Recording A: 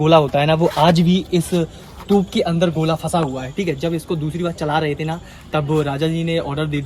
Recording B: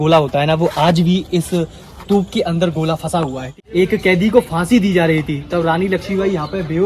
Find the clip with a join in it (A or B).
B